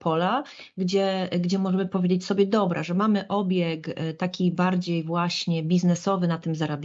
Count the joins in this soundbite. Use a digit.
0